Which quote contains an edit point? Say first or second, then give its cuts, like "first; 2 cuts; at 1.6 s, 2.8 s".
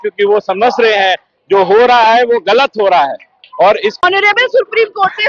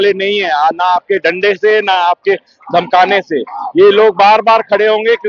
first; 1 cut; at 4.0 s